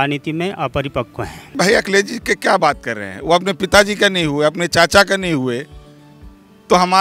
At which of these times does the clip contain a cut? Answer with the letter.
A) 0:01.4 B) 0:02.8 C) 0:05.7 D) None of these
A